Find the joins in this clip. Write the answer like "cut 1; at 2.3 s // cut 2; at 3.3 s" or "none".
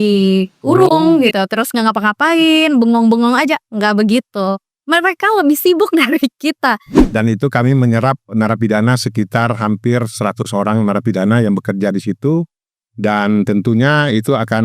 cut 1; at 6.9 s

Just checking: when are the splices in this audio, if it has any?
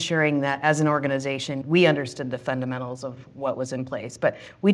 none

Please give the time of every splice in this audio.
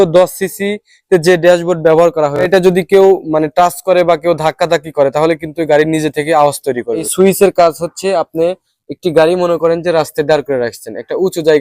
cut 1; at 2.5 s // cut 2; at 7.1 s

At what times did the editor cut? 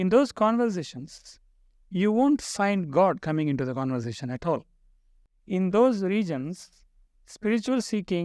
cut 1; at 5.3 s

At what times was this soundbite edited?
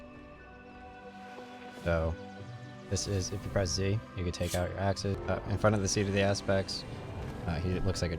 cut 1; at 5.2 s

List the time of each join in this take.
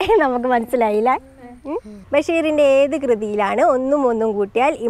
cut 1; at 2.0 s

